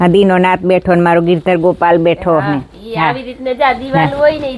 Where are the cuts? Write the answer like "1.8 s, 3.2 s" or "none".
none